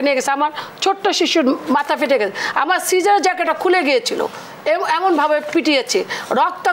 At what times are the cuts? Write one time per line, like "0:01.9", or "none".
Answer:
none